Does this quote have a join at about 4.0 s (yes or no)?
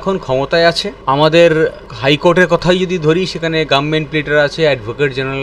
no